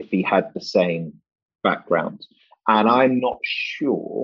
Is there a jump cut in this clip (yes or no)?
yes